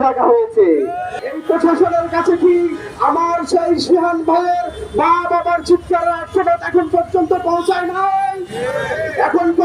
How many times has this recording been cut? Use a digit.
0